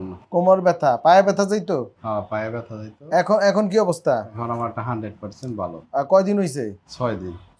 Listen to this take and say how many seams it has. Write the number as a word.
zero